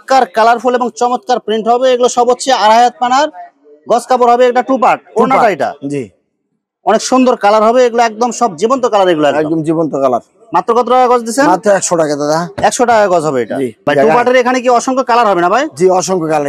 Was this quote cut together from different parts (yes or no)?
no